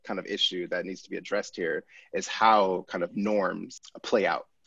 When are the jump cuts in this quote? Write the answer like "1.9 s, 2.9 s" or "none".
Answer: 3.7 s